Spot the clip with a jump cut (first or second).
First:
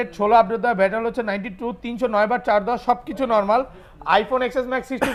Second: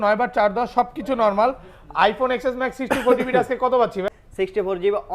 second